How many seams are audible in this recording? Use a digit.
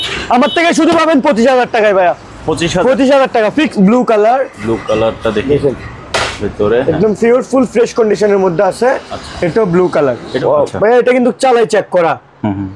2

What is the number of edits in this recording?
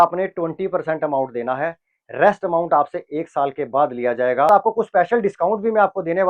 1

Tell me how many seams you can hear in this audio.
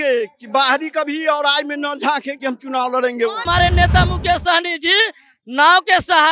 1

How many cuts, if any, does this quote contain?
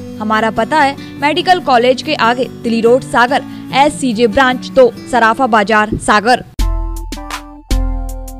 1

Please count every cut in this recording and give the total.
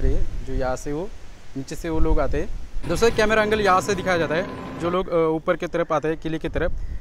1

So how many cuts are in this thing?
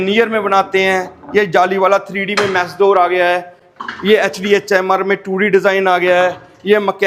0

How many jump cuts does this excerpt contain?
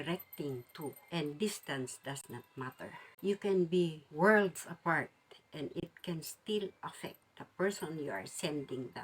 0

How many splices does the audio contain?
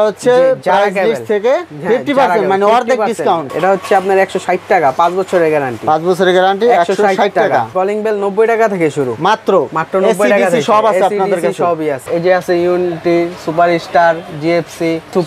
3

